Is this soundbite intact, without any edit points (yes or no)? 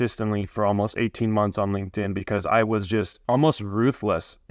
no